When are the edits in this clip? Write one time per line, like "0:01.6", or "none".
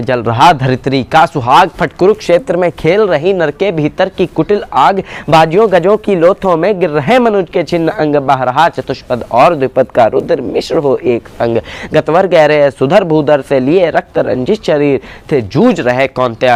none